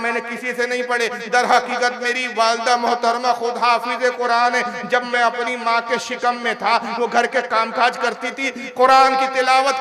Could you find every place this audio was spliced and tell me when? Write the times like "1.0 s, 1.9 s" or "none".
none